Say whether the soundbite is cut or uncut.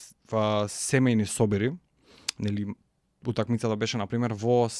uncut